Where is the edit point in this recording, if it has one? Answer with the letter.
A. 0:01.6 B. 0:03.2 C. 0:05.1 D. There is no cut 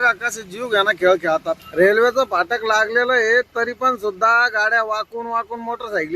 A